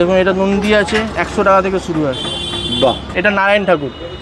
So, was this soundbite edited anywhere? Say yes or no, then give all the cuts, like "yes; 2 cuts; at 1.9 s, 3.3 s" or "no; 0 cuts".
yes; 1 cut; at 3.1 s